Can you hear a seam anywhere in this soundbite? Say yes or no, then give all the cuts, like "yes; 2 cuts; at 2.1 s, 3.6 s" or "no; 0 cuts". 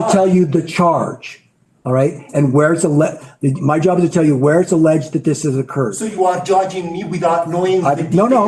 no; 0 cuts